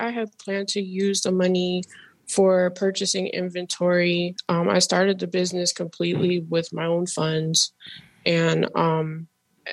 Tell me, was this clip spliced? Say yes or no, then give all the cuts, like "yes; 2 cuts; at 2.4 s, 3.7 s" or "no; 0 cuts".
no; 0 cuts